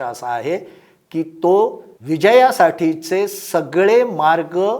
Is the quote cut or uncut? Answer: cut